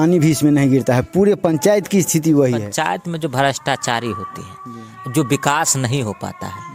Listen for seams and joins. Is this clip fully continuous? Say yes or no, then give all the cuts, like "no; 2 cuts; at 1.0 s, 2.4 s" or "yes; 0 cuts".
no; 1 cut; at 2.7 s